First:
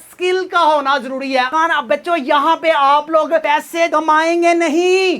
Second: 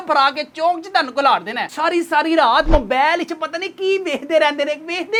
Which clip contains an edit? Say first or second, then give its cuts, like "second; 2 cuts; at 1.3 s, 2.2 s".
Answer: first; 1 cut; at 1.5 s